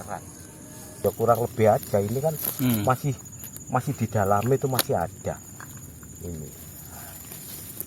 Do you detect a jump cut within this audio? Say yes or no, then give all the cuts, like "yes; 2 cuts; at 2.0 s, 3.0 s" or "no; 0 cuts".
yes; 1 cut; at 1.0 s